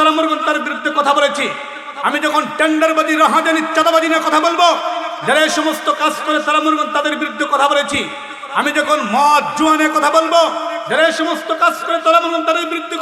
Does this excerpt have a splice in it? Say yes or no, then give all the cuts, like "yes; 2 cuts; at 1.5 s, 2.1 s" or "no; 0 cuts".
no; 0 cuts